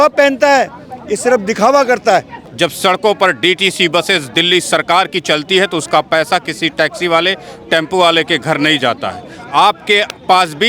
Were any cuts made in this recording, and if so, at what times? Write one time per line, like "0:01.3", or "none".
0:02.4